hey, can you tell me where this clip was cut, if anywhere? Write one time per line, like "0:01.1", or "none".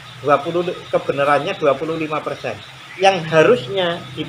none